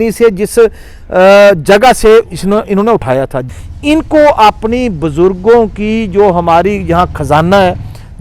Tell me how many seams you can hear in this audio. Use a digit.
1